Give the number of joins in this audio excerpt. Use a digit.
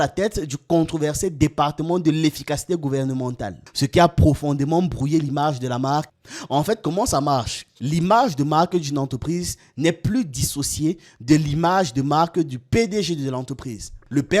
1